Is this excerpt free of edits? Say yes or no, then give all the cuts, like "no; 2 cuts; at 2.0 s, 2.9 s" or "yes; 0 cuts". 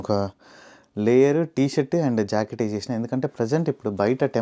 yes; 0 cuts